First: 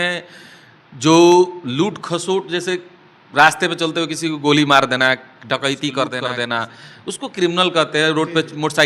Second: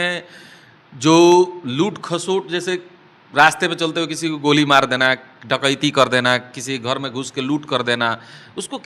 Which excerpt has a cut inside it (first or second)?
first